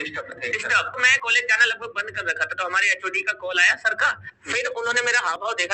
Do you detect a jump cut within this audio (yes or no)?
yes